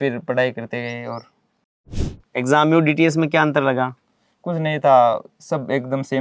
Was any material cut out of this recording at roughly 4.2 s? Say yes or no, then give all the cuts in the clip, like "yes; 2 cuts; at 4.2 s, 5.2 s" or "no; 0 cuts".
no; 1 cut; at 1.9 s